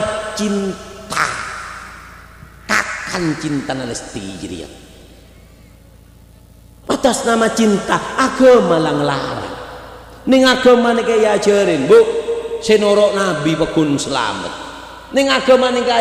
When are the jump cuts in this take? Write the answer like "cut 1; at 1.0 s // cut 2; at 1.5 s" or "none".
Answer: none